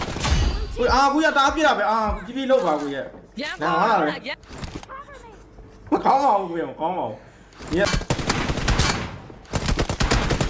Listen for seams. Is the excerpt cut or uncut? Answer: cut